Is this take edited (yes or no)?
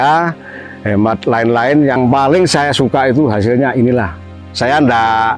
yes